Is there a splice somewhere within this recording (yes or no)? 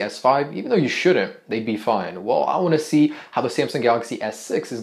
no